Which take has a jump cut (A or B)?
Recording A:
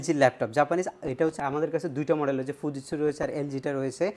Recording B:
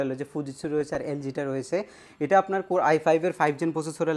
A